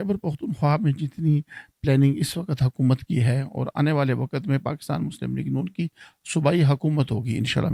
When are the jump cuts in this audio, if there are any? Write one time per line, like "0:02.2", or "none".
none